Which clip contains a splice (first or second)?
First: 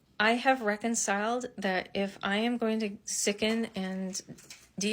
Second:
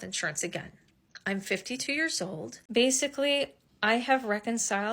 second